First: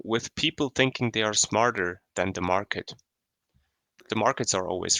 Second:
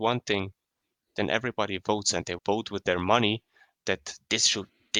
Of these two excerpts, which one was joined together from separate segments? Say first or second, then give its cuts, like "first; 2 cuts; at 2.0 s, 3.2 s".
first; 1 cut; at 4.0 s